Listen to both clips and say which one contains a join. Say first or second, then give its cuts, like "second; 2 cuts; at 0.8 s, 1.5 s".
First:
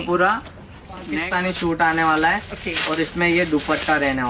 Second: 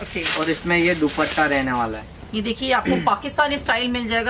first; 1 cut; at 1.1 s